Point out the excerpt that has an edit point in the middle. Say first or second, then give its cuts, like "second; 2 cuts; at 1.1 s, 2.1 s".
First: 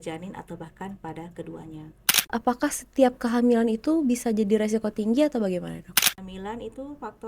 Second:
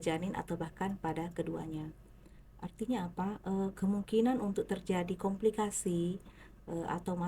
first; 2 cuts; at 2.3 s, 6.0 s